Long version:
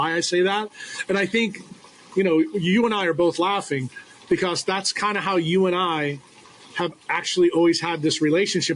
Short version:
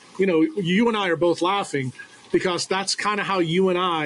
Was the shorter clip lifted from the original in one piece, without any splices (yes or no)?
yes